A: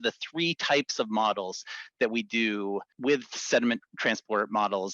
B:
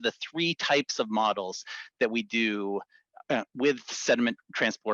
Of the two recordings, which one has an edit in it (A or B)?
A